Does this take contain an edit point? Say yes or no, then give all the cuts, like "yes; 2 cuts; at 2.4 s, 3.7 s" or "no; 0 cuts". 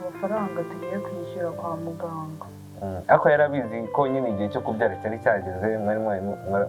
no; 0 cuts